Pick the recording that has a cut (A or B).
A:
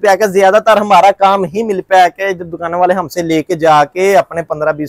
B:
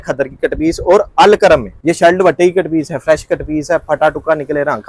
B